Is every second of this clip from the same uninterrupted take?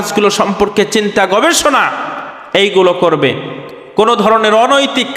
yes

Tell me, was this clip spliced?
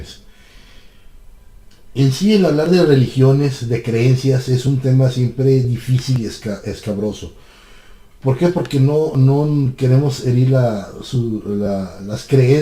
no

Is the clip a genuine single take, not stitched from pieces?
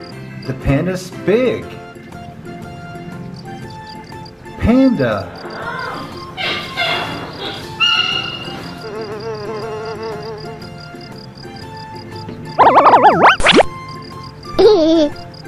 yes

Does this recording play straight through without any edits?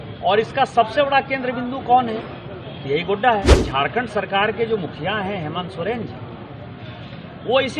no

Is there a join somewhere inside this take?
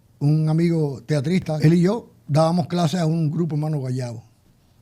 yes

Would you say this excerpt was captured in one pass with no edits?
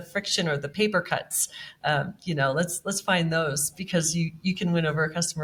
yes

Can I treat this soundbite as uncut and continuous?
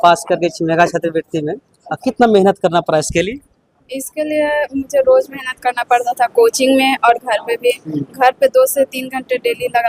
yes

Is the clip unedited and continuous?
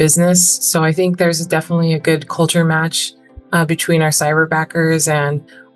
yes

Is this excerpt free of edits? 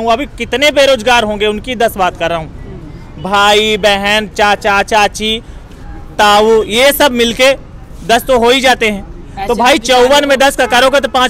yes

